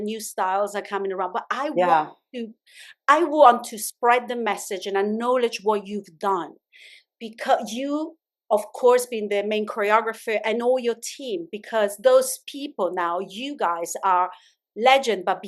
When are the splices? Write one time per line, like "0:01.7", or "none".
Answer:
none